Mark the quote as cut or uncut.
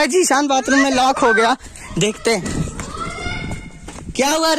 uncut